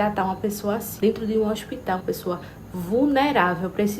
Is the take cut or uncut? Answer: cut